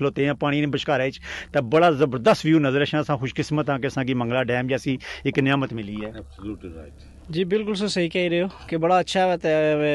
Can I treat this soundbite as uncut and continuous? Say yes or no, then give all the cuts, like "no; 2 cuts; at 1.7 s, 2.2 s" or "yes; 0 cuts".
yes; 0 cuts